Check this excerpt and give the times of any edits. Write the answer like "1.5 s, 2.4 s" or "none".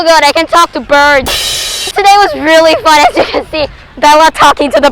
1.9 s